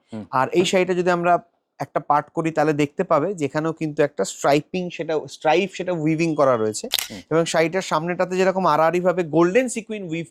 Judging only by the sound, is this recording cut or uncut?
uncut